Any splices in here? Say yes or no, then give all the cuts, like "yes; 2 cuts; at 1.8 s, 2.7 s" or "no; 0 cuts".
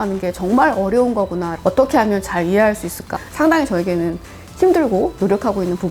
yes; 2 cuts; at 1.5 s, 3.1 s